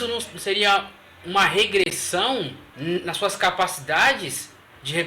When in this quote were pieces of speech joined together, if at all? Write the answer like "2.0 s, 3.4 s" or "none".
2.6 s